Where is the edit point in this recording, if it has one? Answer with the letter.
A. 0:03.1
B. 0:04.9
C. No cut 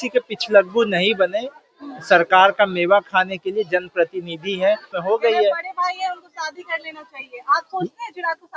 B